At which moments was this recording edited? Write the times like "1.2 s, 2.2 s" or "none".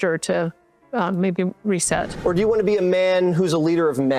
2.1 s

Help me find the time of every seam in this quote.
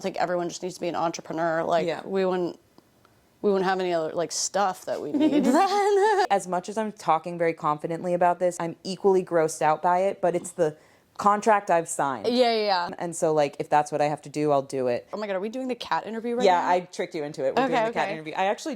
6.3 s, 8.6 s, 12.9 s, 15.2 s

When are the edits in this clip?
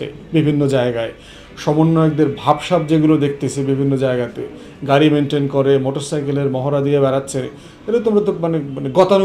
none

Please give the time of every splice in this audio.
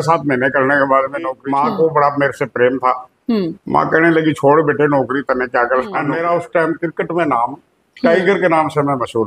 1.4 s, 6.1 s

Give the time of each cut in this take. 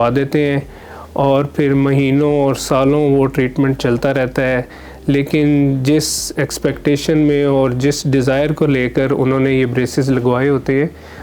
none

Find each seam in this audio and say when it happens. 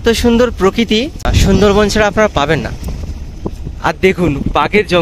1.3 s

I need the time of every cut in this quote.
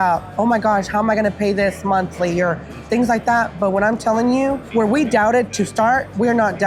none

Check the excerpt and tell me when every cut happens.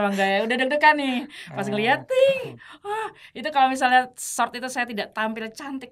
none

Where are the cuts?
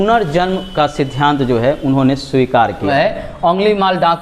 2.9 s

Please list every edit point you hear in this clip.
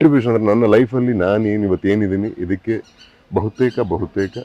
none

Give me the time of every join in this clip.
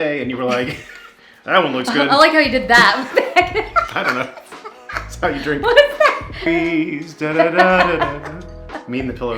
6.4 s

